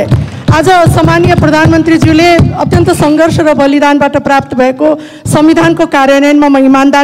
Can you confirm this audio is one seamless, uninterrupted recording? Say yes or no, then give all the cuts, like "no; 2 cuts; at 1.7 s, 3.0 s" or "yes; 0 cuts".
yes; 0 cuts